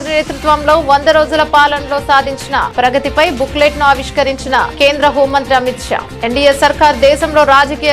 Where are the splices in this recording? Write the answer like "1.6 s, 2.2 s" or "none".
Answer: none